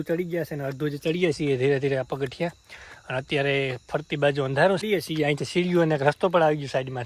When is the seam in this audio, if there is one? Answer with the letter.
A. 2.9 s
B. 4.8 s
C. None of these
B